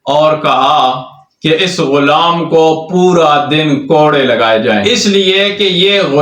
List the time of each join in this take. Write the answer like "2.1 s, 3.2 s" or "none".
4.8 s